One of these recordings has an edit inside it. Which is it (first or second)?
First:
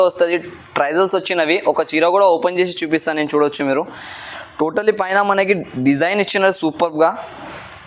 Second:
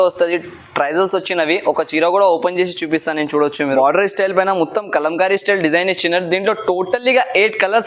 second